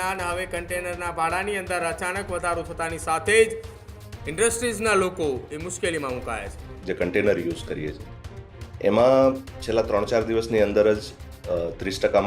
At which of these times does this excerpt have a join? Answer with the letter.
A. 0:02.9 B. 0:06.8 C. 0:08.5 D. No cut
B